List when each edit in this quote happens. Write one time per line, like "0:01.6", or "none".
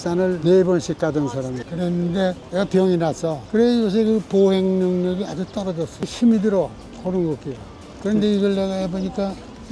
0:03.4